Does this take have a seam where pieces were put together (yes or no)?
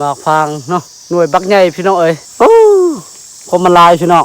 yes